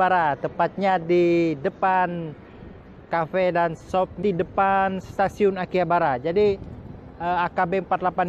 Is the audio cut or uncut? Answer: cut